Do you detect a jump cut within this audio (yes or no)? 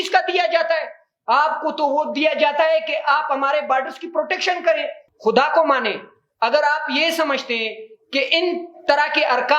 yes